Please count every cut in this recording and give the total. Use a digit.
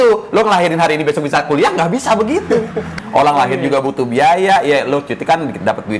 1